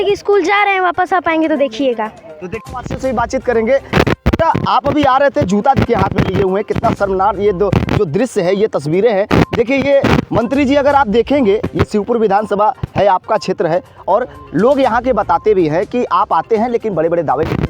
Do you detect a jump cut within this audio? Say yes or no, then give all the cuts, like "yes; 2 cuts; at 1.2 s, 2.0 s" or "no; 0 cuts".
no; 0 cuts